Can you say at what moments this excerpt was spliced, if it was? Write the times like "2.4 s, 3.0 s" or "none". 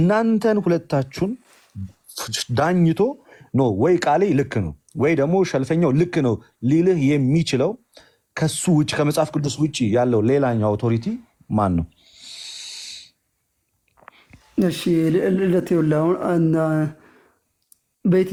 none